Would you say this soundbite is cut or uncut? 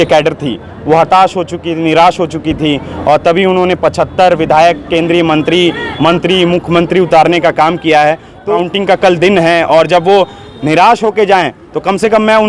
cut